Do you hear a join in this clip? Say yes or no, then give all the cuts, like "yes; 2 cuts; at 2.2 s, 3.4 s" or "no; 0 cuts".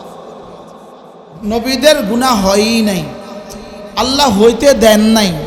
no; 0 cuts